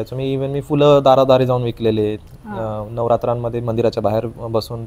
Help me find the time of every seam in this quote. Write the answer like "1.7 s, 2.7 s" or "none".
none

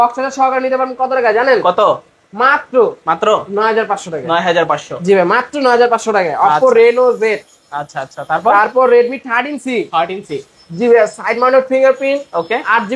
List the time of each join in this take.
none

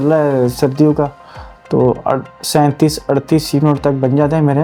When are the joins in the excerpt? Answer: none

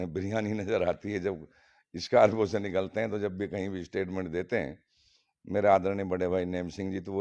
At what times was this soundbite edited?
none

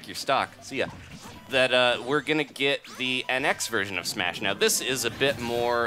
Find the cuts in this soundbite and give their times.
none

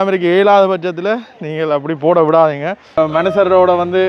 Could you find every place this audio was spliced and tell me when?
2.9 s

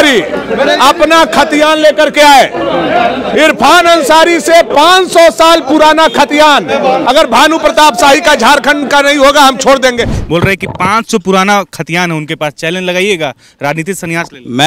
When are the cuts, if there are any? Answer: 10.2 s

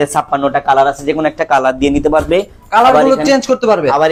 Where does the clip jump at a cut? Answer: none

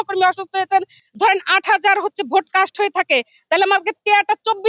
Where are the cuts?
1.0 s

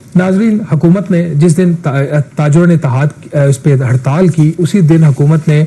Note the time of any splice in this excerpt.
none

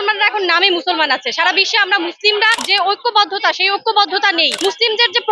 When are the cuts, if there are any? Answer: 2.6 s, 4.5 s

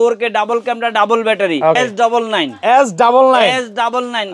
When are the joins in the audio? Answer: 1.8 s

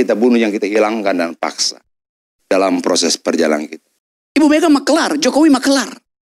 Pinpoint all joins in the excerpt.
3.8 s

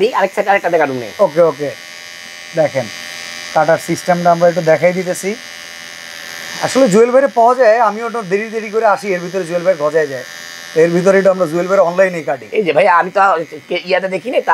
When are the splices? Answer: none

